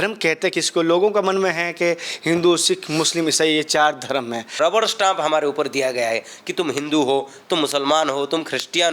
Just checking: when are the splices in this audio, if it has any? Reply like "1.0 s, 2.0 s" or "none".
4.6 s